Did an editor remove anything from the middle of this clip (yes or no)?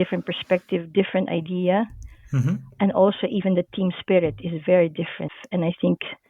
yes